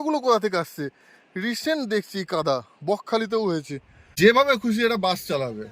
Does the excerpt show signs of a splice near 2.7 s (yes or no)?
no